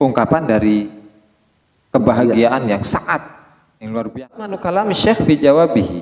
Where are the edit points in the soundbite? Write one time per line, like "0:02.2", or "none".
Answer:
0:04.6